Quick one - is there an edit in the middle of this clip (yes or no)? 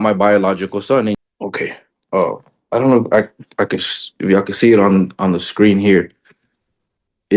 yes